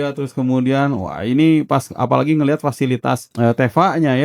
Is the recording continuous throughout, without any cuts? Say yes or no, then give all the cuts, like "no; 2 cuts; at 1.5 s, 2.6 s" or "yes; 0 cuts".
no; 1 cut; at 3.2 s